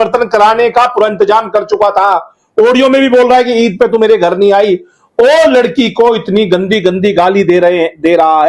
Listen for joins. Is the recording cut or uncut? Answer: uncut